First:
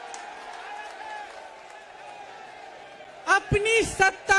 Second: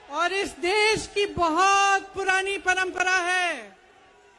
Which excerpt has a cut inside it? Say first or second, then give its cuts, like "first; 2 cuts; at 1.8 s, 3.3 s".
first; 1 cut; at 1.8 s